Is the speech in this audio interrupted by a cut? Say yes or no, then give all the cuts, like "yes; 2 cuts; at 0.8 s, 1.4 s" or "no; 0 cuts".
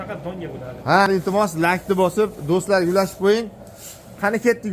yes; 1 cut; at 1.1 s